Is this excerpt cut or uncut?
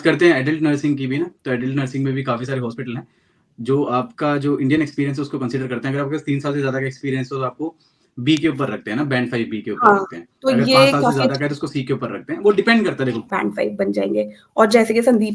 cut